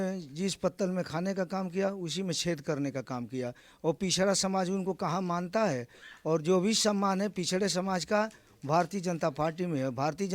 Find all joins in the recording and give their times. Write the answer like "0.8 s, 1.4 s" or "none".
none